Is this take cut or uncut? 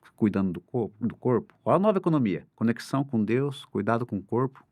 cut